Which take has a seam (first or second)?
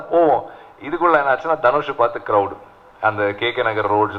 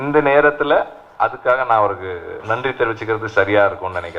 second